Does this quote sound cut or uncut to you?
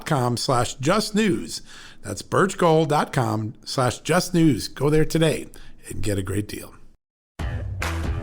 cut